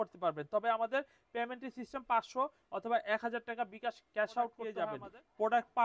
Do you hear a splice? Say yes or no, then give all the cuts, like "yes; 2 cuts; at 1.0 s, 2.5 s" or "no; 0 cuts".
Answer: yes; 1 cut; at 4.7 s